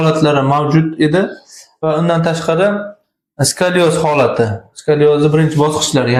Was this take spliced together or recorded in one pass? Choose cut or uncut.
uncut